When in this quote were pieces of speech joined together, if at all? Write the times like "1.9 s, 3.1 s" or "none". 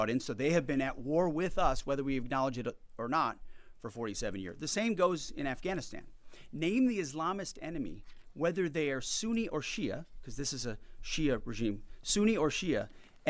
none